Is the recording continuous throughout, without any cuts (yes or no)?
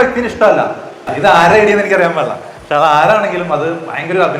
no